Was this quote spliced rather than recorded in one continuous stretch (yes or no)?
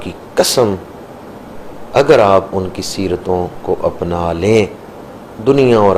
no